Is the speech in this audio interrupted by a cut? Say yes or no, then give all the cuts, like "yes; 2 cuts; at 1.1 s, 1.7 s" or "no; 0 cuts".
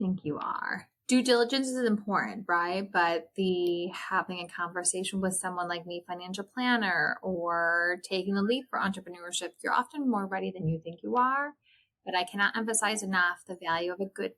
no; 0 cuts